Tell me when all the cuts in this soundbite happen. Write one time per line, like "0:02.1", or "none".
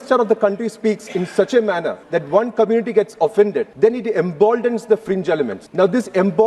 0:02.0
0:03.7
0:05.6